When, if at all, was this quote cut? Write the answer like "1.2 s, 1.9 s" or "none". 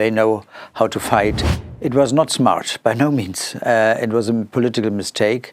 1.5 s